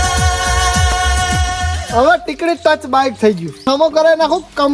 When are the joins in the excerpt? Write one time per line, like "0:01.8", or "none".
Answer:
0:01.7
0:03.6